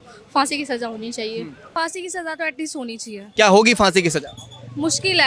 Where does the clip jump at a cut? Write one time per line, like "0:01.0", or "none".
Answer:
0:01.7
0:03.3

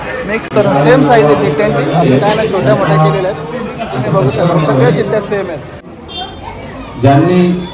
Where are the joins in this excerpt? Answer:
0:05.8

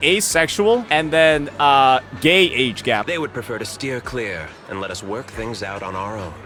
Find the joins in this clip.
none

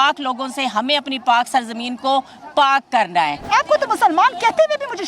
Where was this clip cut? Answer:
0:03.4

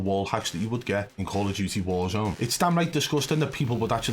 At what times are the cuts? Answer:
0:01.2
0:02.3

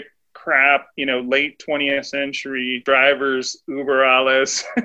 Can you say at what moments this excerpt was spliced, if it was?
0:02.8

